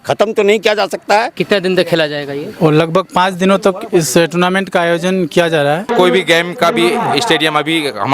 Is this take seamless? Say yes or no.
no